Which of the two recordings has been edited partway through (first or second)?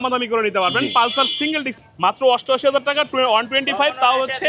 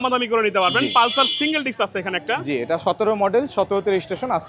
first